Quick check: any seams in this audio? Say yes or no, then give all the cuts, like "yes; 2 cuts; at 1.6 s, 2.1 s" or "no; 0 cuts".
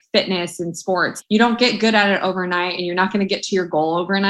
yes; 1 cut; at 1.1 s